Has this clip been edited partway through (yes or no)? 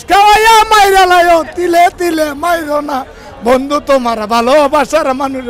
no